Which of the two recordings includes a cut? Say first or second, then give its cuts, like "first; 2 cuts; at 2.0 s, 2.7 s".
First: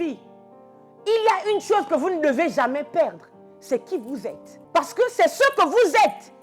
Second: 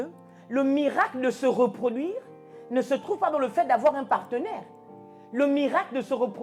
first; 1 cut; at 4.5 s